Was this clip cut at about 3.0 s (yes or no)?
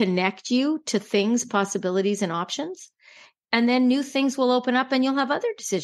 yes